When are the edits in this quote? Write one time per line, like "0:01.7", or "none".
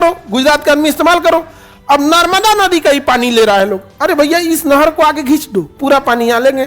0:05.7